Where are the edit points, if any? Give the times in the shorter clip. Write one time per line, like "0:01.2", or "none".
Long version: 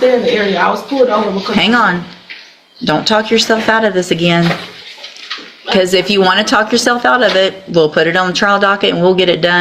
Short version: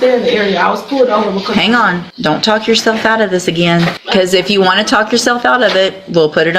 0:02.1
0:04.0